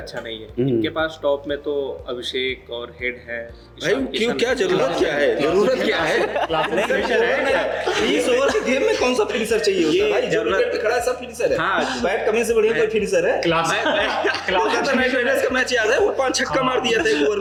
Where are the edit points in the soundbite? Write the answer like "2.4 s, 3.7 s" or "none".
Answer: none